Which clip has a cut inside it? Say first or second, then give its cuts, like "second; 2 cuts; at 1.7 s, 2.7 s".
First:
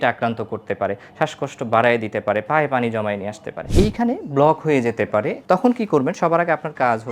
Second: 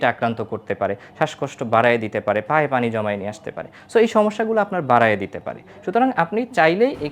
first; 2 cuts; at 3.7 s, 5.4 s